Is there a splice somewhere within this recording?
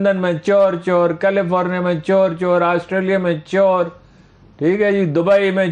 no; 0 cuts

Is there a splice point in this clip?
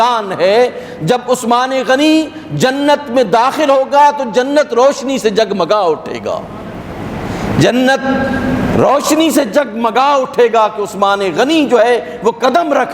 no; 0 cuts

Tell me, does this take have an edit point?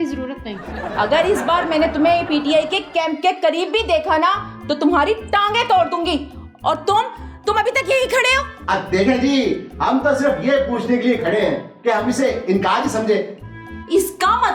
no; 0 cuts

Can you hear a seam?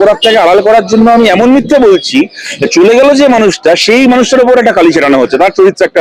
no; 0 cuts

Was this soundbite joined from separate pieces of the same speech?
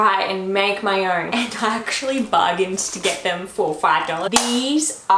yes; 2 cuts; at 1.3 s, 4.3 s

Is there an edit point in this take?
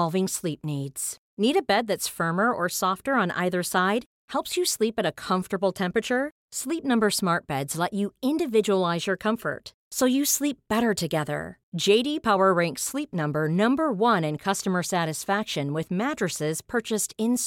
no; 0 cuts

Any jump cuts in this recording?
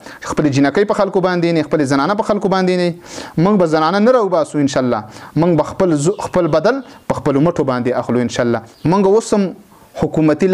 no; 0 cuts

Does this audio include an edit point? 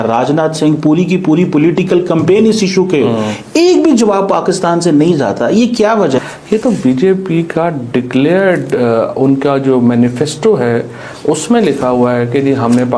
no; 0 cuts

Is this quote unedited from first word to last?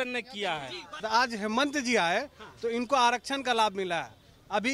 no; 1 cut; at 1.0 s

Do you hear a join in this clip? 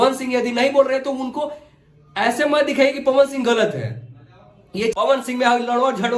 yes; 1 cut; at 4.9 s

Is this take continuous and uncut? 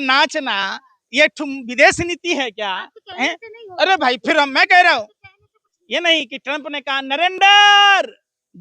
no; 1 cut; at 5.7 s

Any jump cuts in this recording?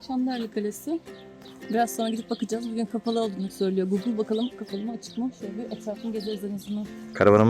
no; 0 cuts

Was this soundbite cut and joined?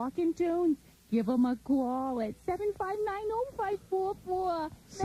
no; 0 cuts

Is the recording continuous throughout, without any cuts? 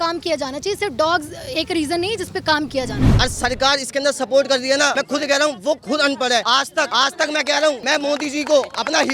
no; 4 cuts; at 3.0 s, 4.9 s, 6.6 s, 7.8 s

